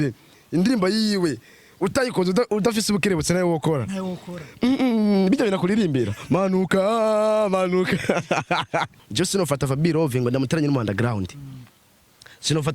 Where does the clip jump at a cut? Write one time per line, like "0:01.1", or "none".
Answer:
0:09.0